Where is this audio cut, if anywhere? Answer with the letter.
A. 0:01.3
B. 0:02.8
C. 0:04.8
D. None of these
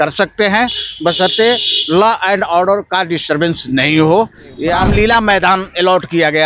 C